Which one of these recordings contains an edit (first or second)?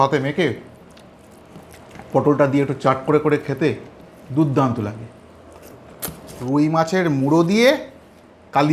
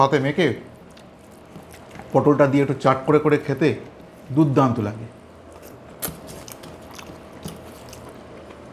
first